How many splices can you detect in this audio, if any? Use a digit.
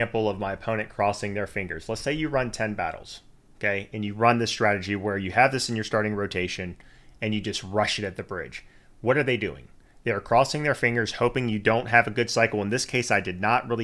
0